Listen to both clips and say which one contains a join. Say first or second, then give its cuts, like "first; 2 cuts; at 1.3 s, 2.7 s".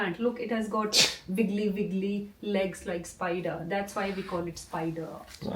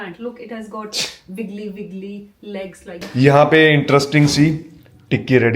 second; 1 cut; at 3.0 s